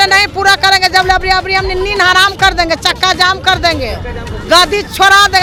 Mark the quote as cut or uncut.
uncut